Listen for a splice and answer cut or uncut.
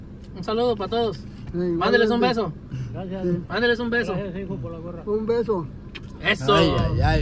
uncut